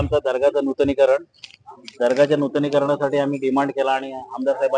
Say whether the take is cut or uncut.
uncut